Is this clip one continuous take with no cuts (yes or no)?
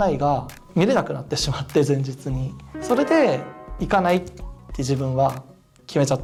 yes